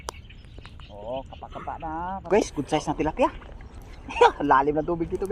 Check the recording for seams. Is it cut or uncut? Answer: cut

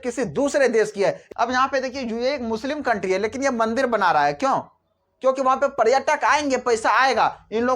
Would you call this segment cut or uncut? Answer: cut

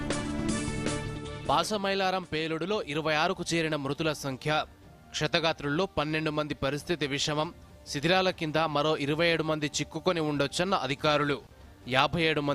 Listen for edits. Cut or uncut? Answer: cut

